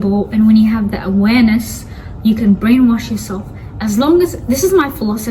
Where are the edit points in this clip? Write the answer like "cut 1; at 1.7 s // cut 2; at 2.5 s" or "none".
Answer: none